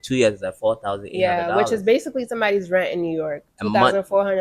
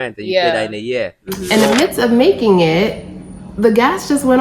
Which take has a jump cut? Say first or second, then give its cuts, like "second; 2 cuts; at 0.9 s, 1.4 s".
second; 1 cut; at 1.4 s